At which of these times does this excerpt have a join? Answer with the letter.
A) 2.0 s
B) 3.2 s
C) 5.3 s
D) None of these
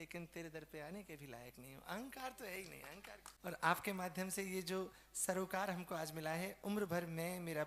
B